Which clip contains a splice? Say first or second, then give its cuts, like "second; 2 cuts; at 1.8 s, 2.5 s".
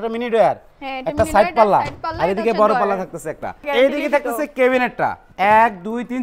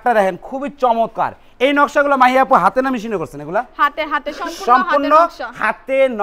first; 2 cuts; at 3.6 s, 5.2 s